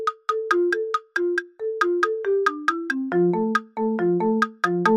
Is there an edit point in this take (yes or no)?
no